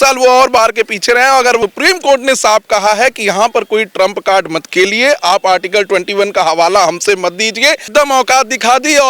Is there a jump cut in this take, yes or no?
yes